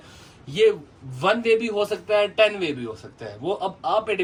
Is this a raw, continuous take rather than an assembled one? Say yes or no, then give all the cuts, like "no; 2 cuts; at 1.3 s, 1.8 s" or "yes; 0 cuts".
yes; 0 cuts